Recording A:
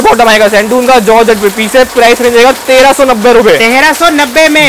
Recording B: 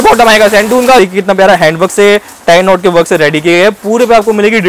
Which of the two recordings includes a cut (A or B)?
B